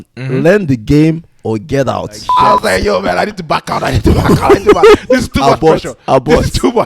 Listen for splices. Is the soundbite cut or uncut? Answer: cut